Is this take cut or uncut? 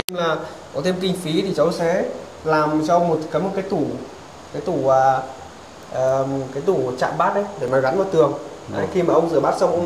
uncut